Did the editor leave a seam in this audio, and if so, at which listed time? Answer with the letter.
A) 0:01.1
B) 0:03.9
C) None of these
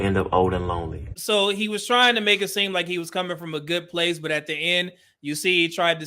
A